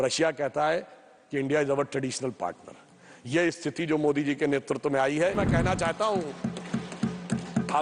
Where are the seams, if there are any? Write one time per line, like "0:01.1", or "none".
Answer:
0:05.3